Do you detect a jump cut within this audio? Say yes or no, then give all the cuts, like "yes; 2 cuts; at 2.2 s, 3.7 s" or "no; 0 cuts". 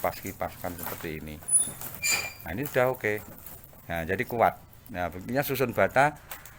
no; 0 cuts